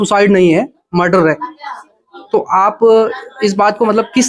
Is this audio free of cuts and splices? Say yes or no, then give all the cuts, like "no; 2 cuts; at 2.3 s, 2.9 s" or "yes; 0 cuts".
yes; 0 cuts